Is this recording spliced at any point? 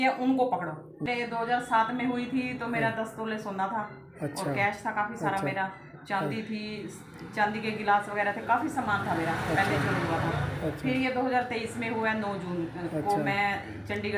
yes; 1 cut; at 1.1 s

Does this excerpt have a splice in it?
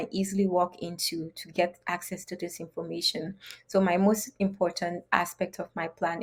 no; 0 cuts

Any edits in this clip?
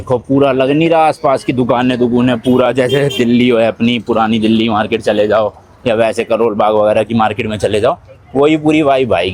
no; 0 cuts

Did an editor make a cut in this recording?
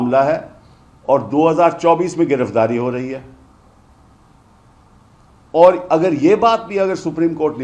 no; 0 cuts

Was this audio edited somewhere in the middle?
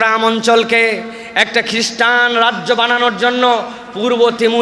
no; 0 cuts

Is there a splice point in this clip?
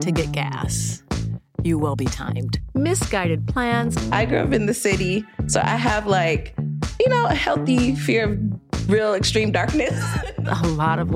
no; 0 cuts

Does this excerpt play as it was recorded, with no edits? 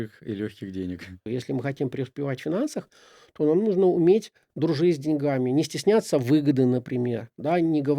no; 1 cut; at 1.2 s

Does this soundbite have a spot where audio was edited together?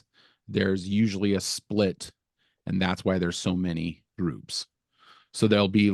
no; 0 cuts

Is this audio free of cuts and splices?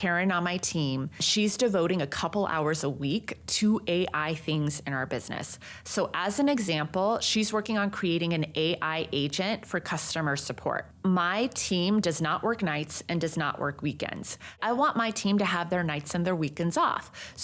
no; 3 cuts; at 1.3 s, 10.9 s, 14.6 s

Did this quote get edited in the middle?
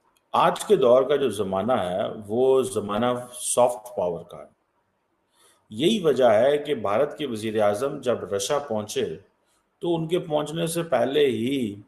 no; 0 cuts

